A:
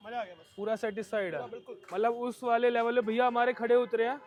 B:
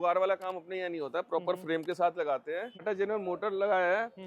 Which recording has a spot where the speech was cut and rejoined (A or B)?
B